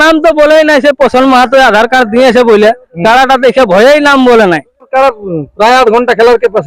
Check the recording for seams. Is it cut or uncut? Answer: cut